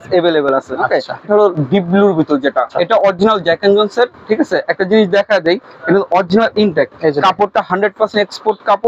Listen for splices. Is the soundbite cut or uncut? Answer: cut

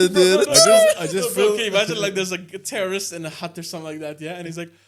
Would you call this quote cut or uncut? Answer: uncut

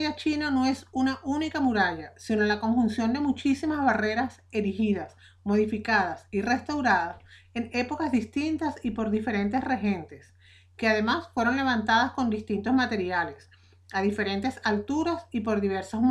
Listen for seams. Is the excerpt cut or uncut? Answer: cut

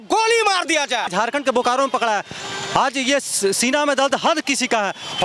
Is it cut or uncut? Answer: cut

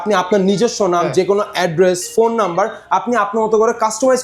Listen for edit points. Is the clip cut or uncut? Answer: uncut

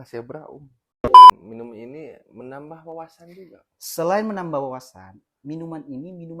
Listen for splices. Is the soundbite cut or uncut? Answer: cut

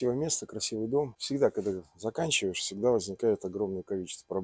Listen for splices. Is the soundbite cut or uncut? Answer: cut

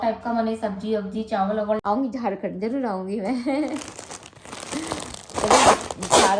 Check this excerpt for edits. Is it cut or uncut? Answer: cut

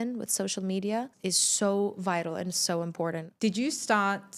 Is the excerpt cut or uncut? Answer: cut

